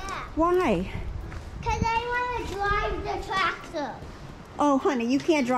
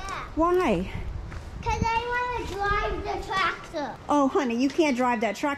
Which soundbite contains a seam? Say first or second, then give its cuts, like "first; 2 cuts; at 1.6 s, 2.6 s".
second; 1 cut; at 4.0 s